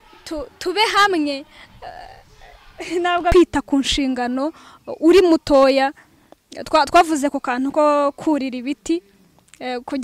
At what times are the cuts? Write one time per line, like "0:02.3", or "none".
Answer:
0:03.3